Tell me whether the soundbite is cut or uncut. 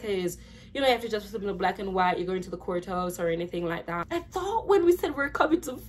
cut